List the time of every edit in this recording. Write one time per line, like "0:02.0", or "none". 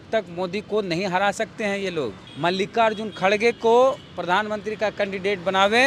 0:02.2

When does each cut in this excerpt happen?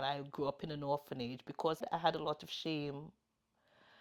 0:01.8

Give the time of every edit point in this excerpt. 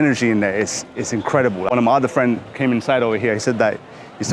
0:01.7

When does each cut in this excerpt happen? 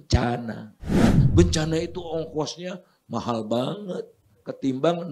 0:01.1

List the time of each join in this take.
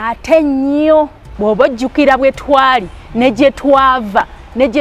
0:01.2

